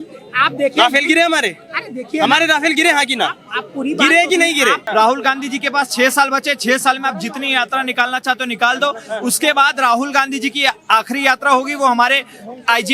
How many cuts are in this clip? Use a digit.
1